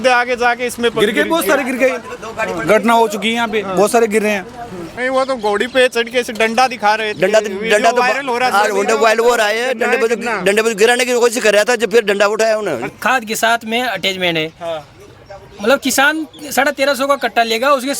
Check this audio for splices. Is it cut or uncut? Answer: cut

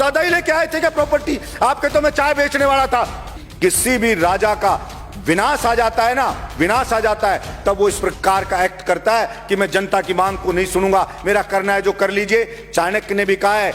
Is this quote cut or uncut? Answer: cut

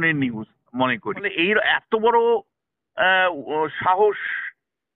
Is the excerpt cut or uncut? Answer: cut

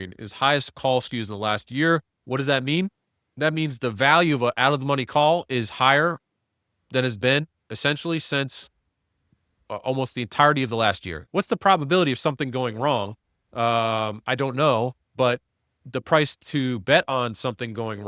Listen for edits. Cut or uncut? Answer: cut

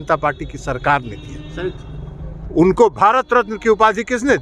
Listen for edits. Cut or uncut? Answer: uncut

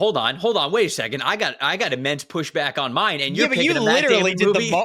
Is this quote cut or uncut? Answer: uncut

